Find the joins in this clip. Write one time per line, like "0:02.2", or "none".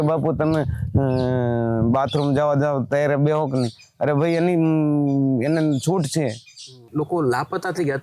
0:06.9